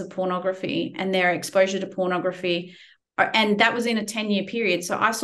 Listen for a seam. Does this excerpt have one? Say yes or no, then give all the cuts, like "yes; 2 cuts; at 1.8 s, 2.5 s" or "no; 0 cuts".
no; 0 cuts